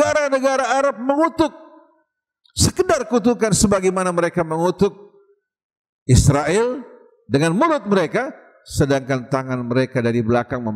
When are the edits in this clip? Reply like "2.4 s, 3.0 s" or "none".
none